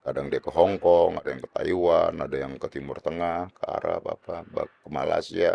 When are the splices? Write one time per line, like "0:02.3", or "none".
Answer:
none

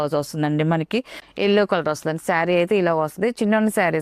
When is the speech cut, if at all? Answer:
0:01.2

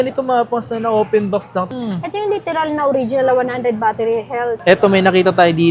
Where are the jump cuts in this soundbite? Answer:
0:01.7
0:04.6

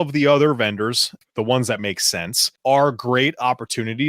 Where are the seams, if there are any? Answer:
0:01.2
0:02.5

